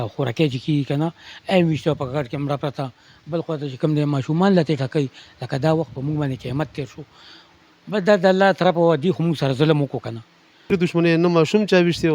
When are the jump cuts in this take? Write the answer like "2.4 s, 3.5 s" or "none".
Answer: 10.7 s